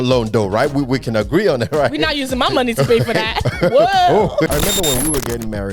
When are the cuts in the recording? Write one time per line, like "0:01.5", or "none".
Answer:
0:04.5